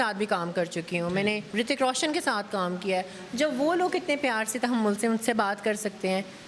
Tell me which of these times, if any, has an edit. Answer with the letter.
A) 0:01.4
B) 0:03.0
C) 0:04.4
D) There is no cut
A